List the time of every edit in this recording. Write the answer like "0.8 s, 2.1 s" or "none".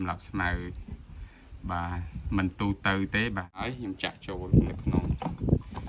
3.7 s